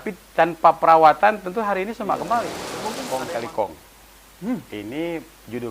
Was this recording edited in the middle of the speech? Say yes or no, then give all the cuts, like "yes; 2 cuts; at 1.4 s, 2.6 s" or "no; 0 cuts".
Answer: yes; 1 cut; at 2.9 s